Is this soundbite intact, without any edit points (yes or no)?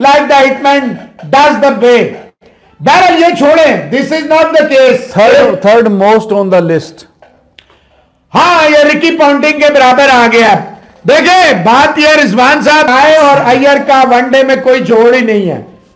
no